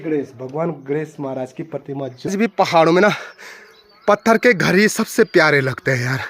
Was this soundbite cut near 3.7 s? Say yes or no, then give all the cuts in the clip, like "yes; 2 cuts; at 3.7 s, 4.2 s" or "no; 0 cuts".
no; 1 cut; at 2.3 s